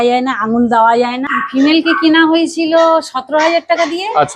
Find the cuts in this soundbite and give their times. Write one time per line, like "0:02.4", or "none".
0:01.3